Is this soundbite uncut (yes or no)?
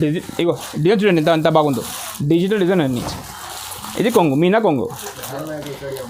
yes